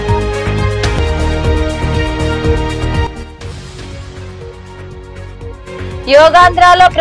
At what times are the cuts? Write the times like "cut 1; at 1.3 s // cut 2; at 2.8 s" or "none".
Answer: cut 1; at 0.9 s